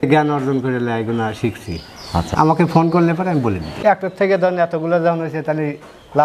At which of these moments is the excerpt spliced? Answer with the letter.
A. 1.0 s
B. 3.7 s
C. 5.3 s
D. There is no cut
B